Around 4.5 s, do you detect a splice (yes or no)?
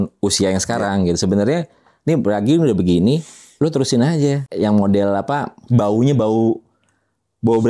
yes